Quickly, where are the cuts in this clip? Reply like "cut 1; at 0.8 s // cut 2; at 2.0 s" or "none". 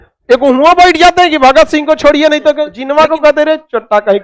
cut 1; at 2.7 s